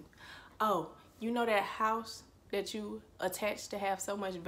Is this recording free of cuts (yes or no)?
yes